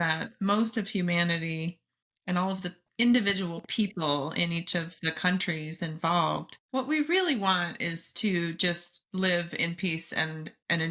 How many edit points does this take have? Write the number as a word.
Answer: zero